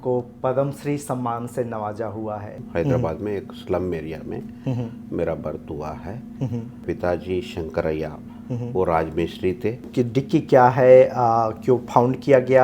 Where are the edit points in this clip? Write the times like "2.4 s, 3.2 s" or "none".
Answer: 2.6 s, 6.8 s, 9.8 s

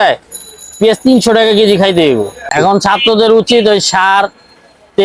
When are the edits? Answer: 2.5 s

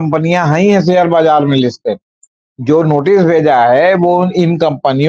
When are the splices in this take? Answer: 2.5 s

